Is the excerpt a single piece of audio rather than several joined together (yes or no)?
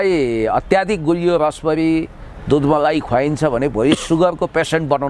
yes